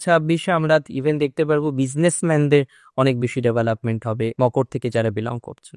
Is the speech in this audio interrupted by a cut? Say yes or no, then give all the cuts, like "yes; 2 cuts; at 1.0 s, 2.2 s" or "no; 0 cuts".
no; 0 cuts